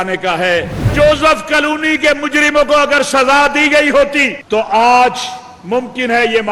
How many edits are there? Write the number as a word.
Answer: two